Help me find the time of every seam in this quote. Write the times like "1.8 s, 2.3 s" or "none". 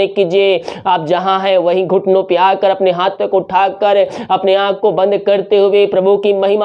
none